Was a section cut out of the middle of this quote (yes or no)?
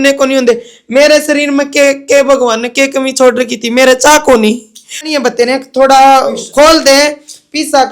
yes